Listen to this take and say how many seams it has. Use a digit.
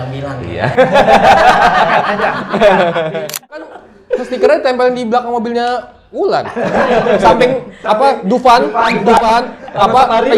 1